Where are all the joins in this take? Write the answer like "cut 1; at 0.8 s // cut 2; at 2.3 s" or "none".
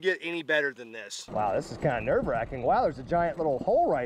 cut 1; at 1.2 s